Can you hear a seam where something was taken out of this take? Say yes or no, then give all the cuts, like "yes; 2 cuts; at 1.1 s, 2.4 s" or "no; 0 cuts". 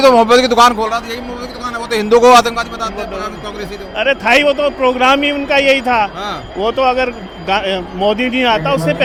no; 0 cuts